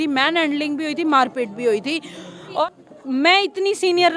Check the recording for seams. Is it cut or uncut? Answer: cut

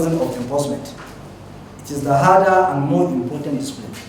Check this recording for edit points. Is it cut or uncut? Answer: uncut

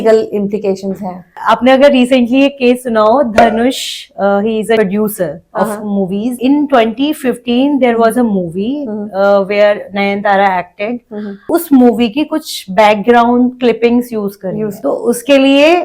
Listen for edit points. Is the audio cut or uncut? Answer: cut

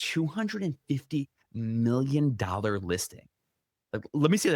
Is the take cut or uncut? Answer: uncut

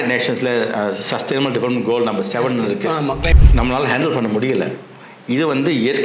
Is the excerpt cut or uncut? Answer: cut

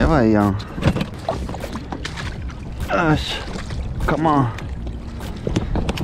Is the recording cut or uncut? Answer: cut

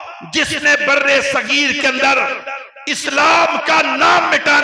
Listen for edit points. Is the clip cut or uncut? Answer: uncut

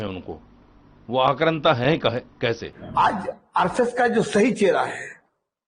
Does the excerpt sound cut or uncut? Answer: cut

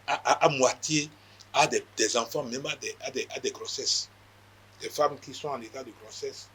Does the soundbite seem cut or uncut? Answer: uncut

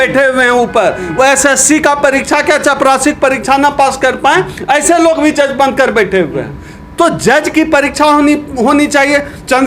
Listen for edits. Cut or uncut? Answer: uncut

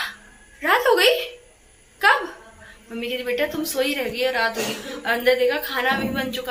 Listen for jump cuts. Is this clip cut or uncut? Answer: uncut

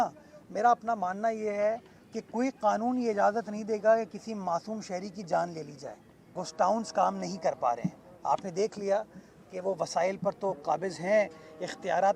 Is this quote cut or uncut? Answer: cut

